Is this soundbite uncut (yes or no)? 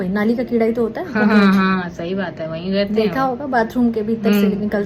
yes